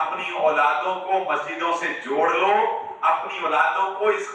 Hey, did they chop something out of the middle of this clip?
no; 0 cuts

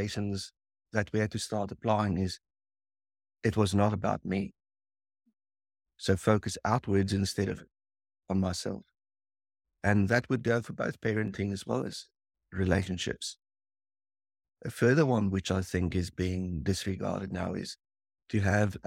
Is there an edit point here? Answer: no; 0 cuts

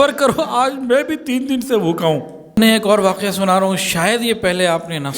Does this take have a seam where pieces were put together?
yes; 1 cut; at 2.6 s

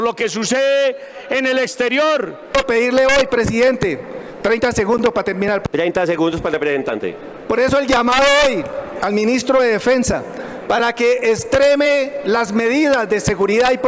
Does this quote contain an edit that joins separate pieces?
yes; 1 cut; at 2.5 s

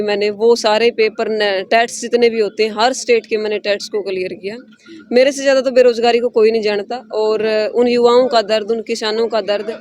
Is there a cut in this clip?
no; 0 cuts

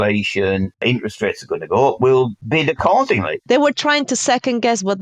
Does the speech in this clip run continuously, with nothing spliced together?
no; 3 cuts; at 0.8 s, 2.4 s, 3.3 s

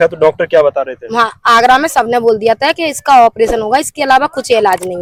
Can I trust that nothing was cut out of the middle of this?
yes; 0 cuts

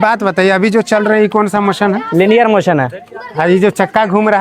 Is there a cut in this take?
no; 0 cuts

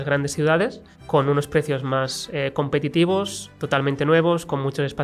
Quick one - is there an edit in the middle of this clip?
no; 0 cuts

